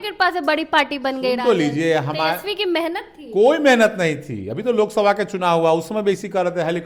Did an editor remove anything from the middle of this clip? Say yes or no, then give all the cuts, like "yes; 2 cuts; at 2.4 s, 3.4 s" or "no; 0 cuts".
no; 0 cuts